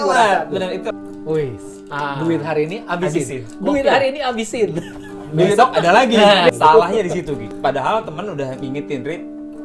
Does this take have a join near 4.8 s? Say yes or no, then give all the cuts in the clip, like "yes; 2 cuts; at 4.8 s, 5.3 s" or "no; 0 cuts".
no; 3 cuts; at 0.9 s, 6.5 s, 7.5 s